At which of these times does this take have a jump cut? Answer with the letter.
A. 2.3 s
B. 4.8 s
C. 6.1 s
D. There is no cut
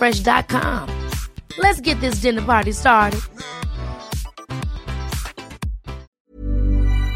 C